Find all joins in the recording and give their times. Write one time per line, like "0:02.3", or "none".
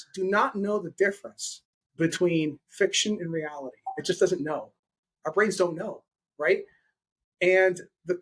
none